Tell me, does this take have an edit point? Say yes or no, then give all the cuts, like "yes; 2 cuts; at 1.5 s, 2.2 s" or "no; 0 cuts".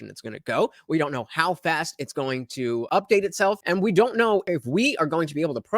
yes; 3 cuts; at 2.9 s, 3.6 s, 4.4 s